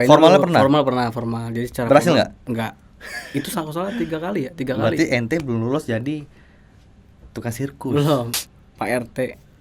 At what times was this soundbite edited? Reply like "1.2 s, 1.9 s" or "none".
8.3 s